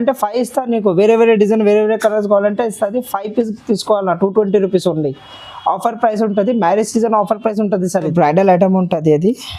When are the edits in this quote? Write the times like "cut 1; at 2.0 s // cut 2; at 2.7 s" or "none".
cut 1; at 8.1 s